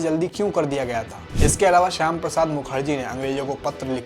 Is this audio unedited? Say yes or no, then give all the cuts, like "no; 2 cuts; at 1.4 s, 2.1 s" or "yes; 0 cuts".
no; 1 cut; at 1.2 s